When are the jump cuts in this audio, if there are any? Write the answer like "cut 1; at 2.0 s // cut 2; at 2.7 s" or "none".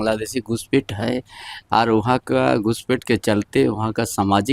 none